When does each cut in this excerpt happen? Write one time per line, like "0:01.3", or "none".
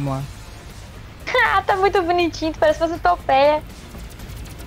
none